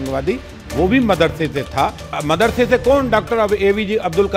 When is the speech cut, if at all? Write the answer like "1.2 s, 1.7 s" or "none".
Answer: 2.1 s